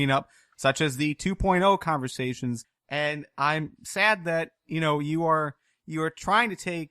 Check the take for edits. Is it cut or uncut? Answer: cut